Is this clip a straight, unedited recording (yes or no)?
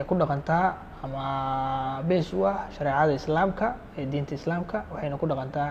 yes